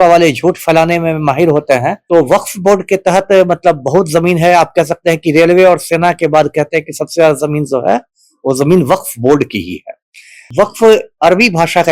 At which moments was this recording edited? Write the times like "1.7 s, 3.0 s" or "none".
2.0 s, 10.5 s